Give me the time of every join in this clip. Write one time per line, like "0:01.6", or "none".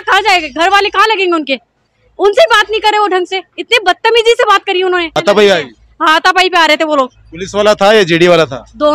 none